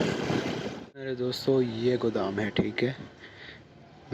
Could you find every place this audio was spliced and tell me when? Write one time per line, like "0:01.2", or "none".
0:01.1